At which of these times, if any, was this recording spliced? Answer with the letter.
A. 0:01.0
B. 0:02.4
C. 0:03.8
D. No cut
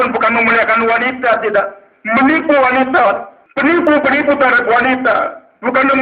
C